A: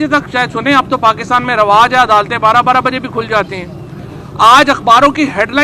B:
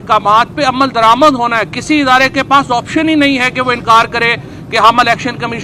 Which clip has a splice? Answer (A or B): A